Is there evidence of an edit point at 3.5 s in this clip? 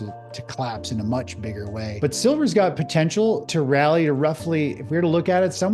yes; 2 cuts; at 1.8 s, 3.5 s

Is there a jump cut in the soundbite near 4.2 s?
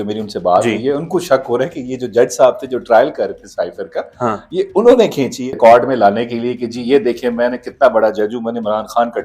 no; 1 cut; at 5.5 s

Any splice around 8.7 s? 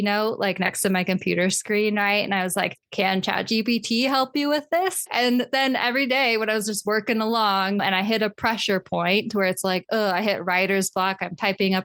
no; 0 cuts

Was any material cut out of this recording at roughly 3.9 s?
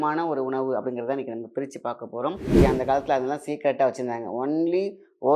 no; 1 cut; at 2.5 s

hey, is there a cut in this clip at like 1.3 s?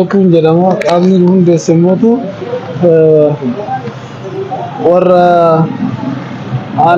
no; 0 cuts

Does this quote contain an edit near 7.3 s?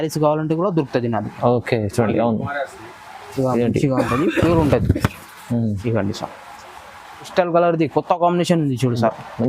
yes; 1 cut; at 7.3 s

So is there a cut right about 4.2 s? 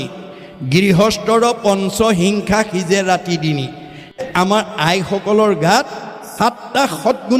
yes; 1 cut; at 4.2 s

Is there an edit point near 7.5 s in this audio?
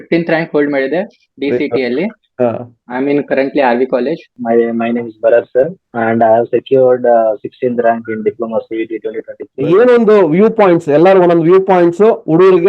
no; 4 cuts; at 2.8 s, 4.4 s, 5.8 s, 9.5 s

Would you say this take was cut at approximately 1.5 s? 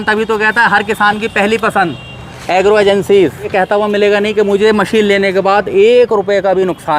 no; 1 cut; at 3.4 s

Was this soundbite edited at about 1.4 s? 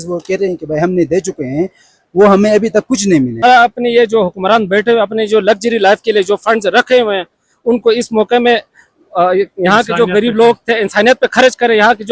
no; 1 cut; at 3.4 s

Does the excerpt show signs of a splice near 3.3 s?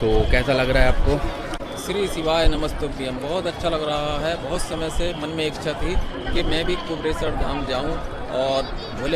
no; 0 cuts

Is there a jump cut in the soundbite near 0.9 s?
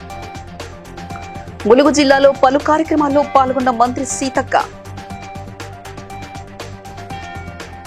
yes; 1 cut; at 0.9 s

